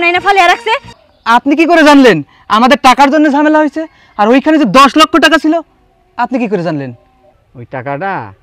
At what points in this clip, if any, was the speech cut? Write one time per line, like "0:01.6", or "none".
0:00.9